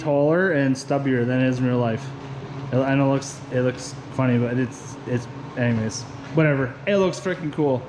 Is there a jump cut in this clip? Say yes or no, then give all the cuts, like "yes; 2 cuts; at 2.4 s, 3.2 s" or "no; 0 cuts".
no; 0 cuts